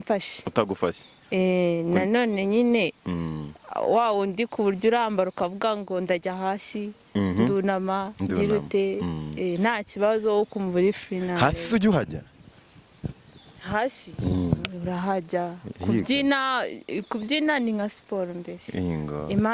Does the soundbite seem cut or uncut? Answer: uncut